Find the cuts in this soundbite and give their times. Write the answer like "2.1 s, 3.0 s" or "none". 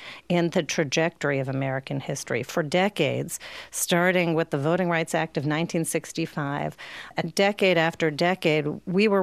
7.1 s